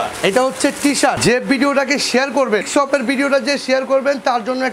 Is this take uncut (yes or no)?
no